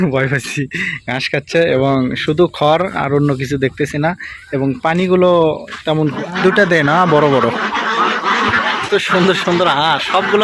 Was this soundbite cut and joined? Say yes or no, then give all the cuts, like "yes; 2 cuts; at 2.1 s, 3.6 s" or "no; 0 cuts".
yes; 2 cuts; at 6.1 s, 8.5 s